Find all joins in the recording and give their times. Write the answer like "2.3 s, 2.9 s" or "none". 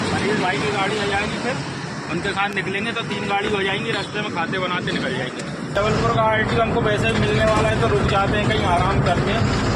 5.8 s